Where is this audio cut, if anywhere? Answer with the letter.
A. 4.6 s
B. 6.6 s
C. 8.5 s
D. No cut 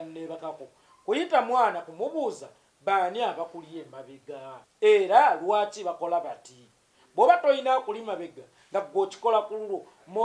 A